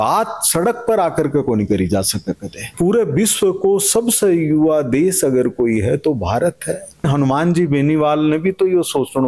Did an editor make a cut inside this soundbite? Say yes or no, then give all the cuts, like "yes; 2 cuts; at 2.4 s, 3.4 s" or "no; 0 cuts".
yes; 2 cuts; at 2.6 s, 7.1 s